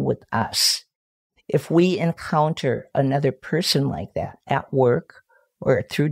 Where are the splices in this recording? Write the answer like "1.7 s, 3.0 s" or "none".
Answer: none